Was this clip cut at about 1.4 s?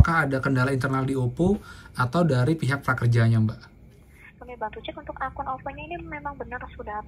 no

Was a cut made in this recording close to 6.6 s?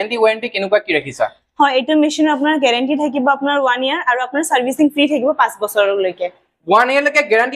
no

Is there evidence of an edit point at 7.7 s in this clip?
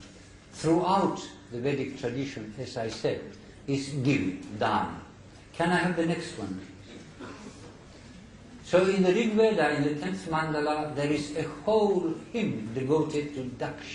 no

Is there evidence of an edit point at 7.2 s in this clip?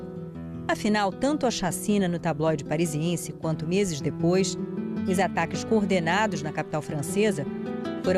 yes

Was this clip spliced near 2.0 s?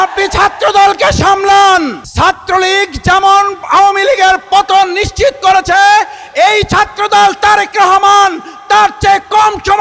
yes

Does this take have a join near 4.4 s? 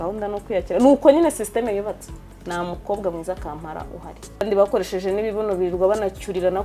yes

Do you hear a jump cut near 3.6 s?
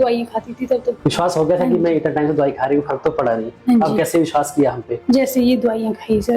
no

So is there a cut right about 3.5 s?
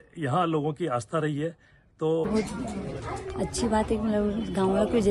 no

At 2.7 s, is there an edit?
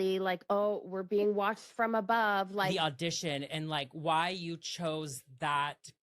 yes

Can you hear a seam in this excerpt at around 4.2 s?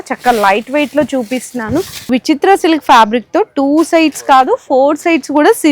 no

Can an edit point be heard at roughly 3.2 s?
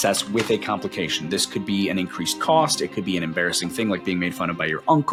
no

